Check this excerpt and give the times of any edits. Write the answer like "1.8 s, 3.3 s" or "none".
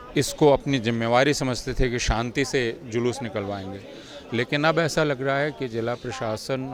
none